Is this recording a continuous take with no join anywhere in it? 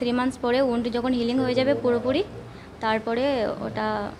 yes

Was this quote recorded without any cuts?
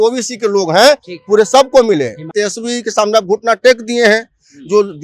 no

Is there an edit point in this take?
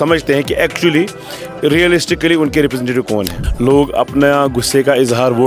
yes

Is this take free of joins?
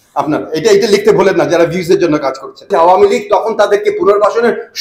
no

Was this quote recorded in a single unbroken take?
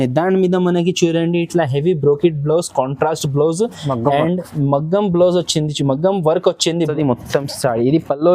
no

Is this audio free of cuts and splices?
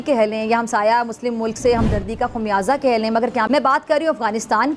yes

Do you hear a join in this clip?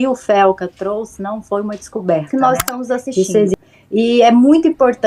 yes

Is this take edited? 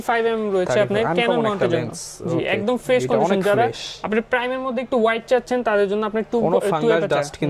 no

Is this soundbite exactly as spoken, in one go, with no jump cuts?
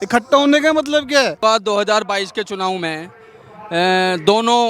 no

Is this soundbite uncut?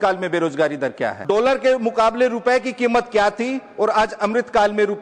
no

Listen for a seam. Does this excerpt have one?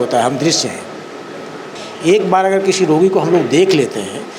yes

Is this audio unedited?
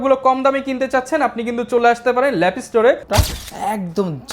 no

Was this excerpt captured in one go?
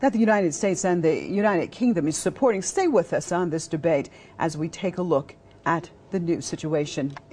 yes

